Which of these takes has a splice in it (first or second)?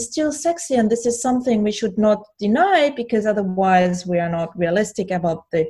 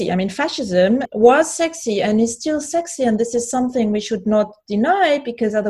second